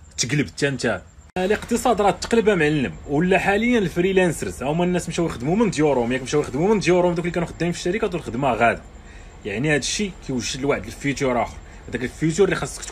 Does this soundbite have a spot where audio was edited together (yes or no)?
no